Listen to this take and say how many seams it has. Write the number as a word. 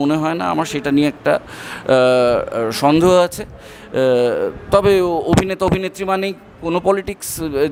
zero